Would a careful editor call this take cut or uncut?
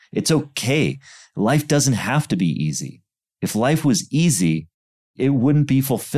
cut